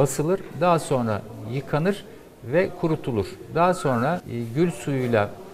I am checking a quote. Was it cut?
yes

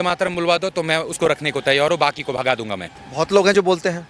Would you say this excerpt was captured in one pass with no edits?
yes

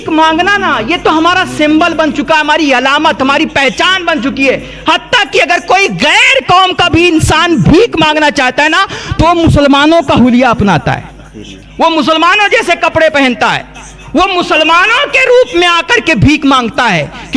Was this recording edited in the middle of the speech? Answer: no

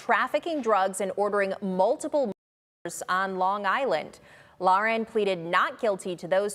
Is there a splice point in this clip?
no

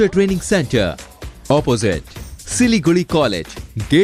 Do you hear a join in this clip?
no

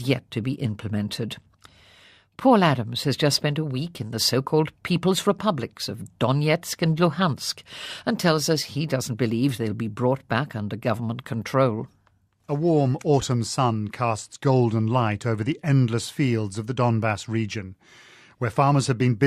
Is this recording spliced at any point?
yes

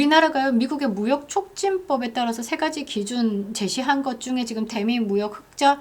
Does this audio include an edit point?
no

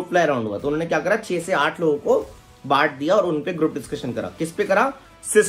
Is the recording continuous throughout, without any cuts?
yes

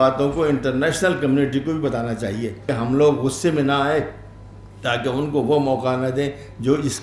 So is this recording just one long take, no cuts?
no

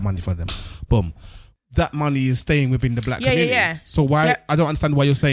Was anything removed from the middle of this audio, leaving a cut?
yes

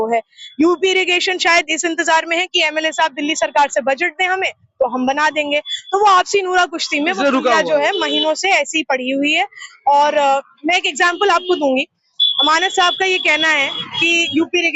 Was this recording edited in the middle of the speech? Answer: no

